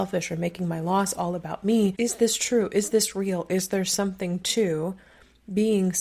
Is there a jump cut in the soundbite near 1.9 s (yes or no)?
yes